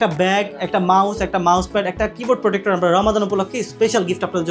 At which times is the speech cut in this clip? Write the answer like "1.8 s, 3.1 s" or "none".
none